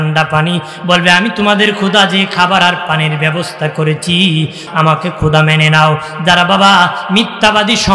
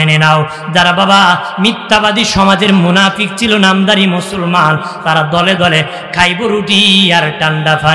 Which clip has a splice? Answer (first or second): first